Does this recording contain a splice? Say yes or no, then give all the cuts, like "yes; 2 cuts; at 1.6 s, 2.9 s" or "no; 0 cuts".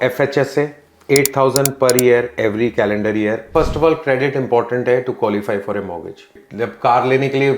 yes; 2 cuts; at 3.5 s, 6.3 s